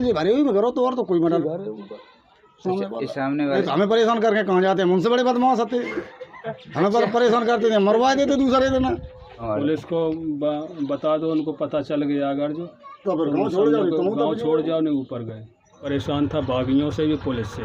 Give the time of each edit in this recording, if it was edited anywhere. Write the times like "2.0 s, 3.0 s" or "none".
1.4 s, 3.6 s, 9.5 s, 15.8 s